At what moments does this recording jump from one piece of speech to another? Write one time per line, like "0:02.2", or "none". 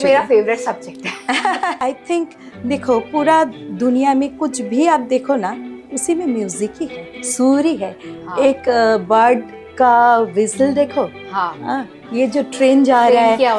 0:01.8